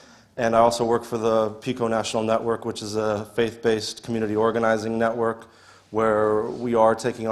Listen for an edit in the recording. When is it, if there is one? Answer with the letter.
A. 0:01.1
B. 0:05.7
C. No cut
A